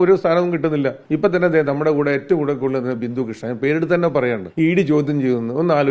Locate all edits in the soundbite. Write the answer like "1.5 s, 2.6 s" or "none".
1.0 s, 4.5 s